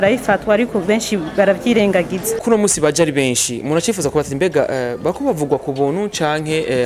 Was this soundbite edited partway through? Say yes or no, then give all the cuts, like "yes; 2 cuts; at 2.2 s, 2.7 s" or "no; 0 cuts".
yes; 1 cut; at 2.4 s